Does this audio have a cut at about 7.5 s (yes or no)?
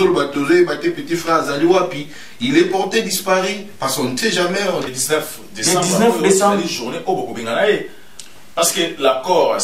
no